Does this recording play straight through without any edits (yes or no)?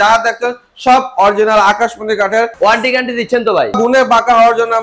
no